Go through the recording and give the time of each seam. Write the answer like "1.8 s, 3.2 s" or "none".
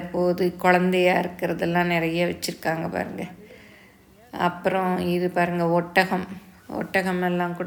none